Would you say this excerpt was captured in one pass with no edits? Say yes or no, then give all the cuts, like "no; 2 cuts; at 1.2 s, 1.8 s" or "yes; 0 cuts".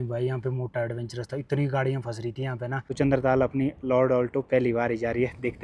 no; 1 cut; at 2.9 s